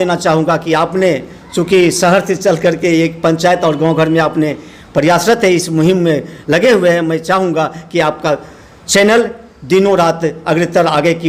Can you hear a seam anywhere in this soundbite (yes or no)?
no